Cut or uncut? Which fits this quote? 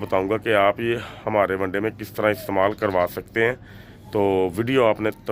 uncut